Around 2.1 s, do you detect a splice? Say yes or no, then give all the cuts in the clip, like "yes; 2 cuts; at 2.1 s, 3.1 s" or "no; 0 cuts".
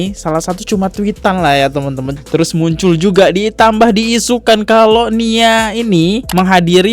yes; 1 cut; at 2.1 s